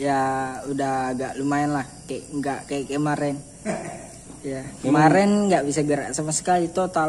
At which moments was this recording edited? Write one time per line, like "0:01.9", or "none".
none

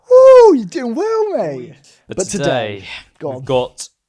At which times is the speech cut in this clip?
0:01.4

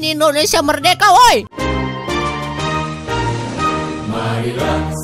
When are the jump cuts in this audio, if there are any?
none

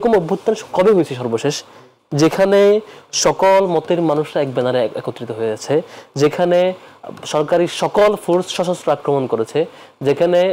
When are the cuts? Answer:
none

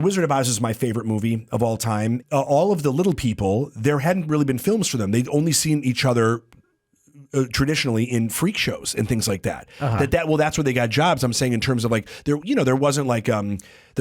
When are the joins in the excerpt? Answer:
0:02.2

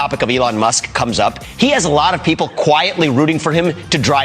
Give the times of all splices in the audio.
0:01.4

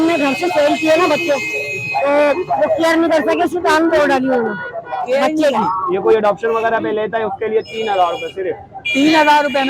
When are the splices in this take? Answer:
0:05.9

